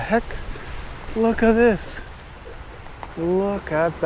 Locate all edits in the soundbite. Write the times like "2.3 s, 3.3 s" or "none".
none